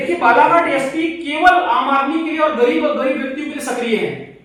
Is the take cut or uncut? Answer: uncut